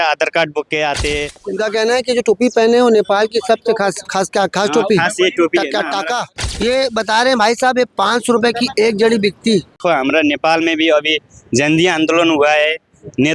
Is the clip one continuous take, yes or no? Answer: no